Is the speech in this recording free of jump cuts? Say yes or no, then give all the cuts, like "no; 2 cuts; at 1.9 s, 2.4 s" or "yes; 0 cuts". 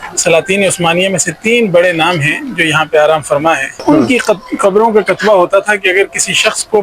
no; 1 cut; at 3.8 s